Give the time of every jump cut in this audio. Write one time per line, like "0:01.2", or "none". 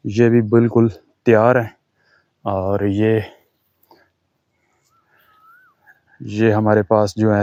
none